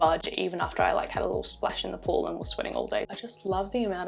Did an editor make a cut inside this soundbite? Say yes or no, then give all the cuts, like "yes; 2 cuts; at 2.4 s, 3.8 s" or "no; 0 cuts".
yes; 1 cut; at 3.1 s